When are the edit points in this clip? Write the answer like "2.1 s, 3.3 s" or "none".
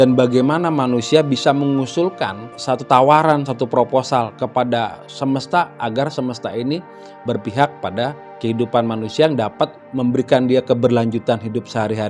2.5 s, 8.3 s, 9.8 s